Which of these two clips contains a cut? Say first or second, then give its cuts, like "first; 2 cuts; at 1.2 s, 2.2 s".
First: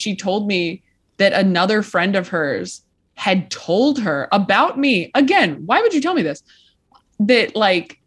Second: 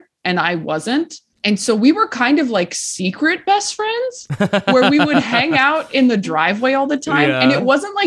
second; 1 cut; at 1.2 s